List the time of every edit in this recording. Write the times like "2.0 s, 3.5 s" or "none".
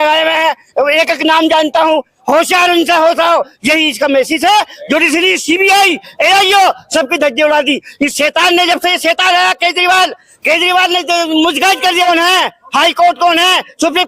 3.5 s, 12.0 s